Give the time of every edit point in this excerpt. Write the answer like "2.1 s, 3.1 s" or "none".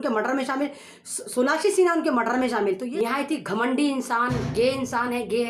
2.9 s